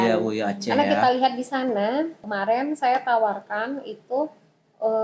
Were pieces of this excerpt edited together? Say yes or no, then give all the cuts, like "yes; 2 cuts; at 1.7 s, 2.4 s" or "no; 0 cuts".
yes; 1 cut; at 2.2 s